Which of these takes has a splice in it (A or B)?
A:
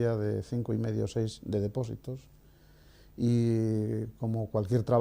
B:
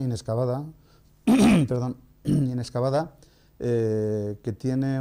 A